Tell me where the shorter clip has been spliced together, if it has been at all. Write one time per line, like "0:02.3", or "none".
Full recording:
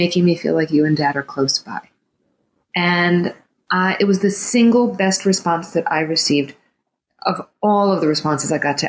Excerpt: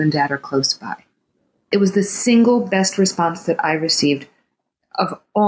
0:01.7